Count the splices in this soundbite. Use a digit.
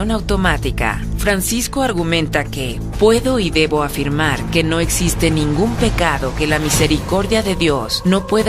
1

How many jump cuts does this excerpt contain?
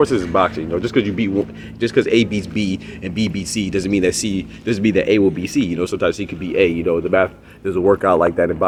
0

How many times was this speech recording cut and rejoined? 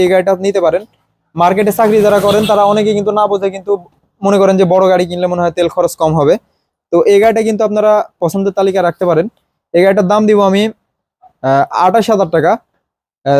0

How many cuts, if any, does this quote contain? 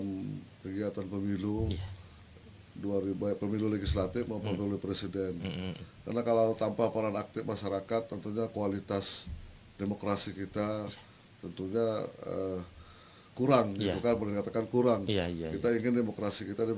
0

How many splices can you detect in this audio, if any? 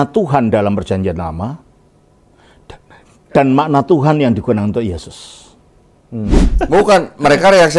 1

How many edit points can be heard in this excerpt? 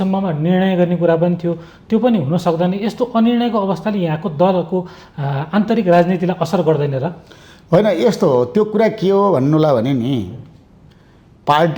0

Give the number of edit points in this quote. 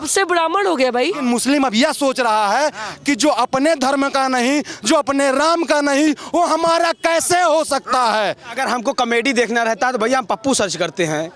2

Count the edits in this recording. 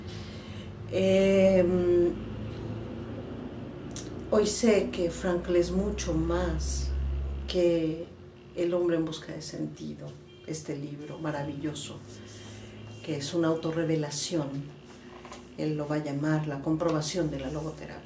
1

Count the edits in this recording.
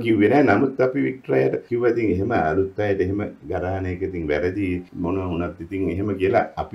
2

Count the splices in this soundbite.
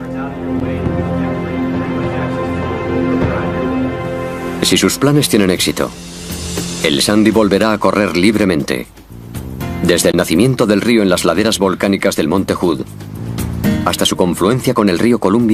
1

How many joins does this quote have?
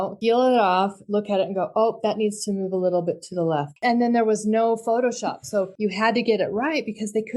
2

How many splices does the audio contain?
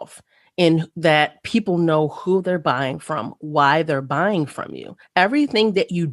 1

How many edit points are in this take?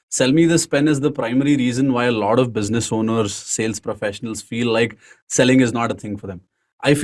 0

